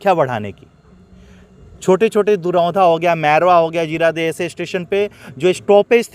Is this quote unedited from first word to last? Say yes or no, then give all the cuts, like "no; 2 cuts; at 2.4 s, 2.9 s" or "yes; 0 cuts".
yes; 0 cuts